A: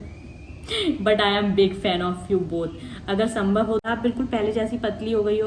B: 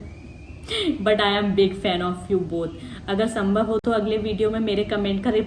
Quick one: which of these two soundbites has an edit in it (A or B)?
A